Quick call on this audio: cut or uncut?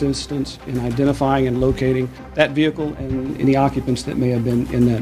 cut